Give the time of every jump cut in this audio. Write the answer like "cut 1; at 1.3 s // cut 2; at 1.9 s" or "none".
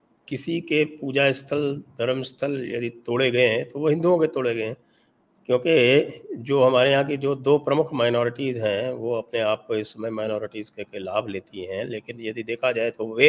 none